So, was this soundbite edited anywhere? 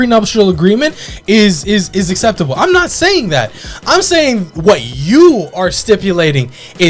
no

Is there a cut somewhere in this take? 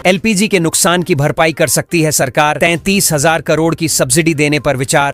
no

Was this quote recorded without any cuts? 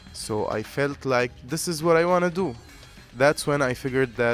yes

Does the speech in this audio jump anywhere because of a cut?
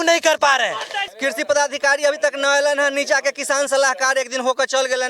yes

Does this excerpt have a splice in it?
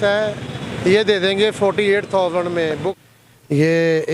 yes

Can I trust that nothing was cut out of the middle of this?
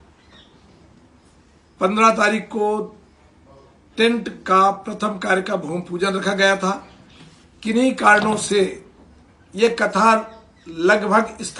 yes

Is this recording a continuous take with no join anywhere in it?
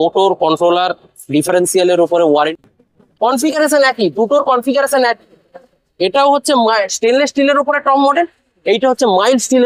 no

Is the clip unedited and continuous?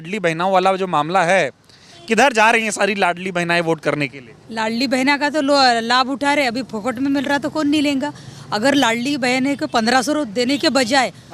yes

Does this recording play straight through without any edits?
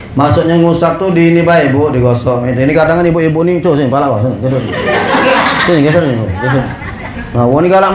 yes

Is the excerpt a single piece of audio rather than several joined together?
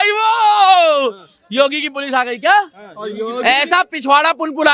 yes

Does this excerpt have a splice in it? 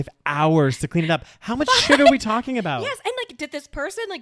no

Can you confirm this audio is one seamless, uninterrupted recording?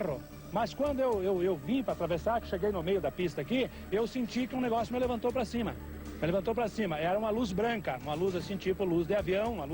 yes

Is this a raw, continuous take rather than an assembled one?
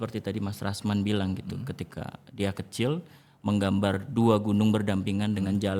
yes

